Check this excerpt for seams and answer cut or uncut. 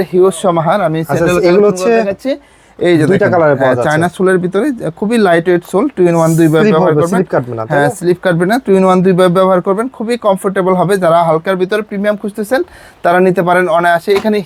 uncut